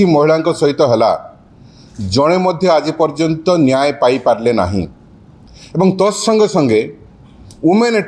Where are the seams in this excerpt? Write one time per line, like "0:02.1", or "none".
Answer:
none